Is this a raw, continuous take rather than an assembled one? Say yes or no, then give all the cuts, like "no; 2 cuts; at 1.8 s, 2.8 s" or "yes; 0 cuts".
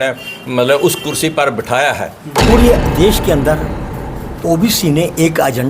no; 1 cut; at 2.3 s